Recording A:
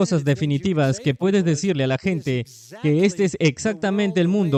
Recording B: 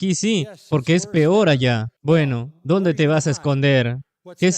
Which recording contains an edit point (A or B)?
B